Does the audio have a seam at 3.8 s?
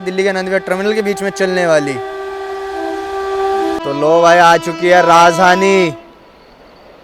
yes; 1 cut; at 3.8 s

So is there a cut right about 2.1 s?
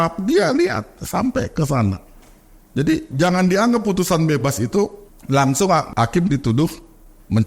no; 2 cuts; at 5.1 s, 5.9 s

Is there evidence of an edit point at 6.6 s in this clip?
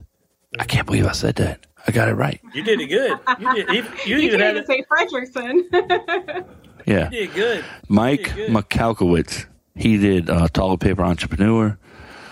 no; 0 cuts

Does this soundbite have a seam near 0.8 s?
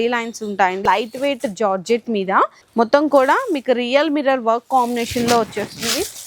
yes; 2 cuts; at 0.8 s, 2.6 s

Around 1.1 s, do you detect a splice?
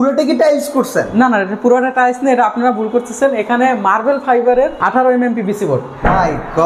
no; 1 cut; at 4.8 s

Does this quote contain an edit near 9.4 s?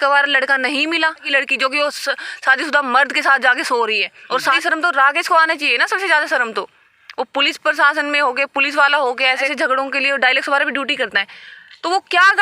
yes; 3 cuts; at 1.3 s, 4.6 s, 9.4 s

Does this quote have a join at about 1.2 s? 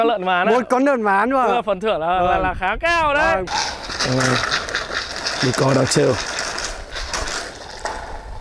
no; 1 cut; at 3.5 s

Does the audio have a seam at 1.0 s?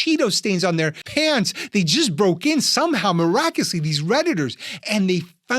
yes; 1 cut; at 1.0 s

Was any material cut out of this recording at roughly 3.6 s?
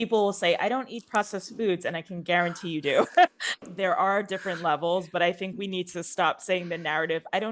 yes; 1 cut; at 3.6 s

